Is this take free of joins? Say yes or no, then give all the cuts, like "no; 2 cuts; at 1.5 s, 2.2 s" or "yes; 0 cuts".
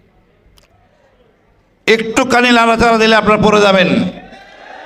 yes; 0 cuts